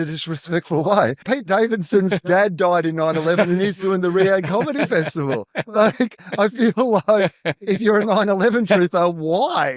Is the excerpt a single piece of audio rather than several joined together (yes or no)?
no